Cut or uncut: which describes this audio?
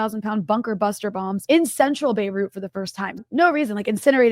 cut